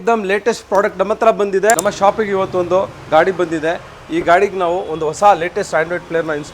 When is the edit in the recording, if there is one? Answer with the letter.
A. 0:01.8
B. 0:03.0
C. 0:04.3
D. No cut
A